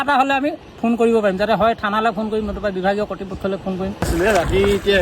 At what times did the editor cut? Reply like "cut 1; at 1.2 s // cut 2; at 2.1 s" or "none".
cut 1; at 4.1 s